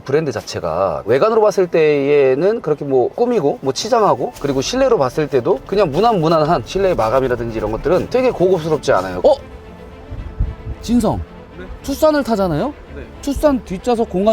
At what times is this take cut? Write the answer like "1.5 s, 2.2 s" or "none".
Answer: 1.0 s, 4.3 s, 9.1 s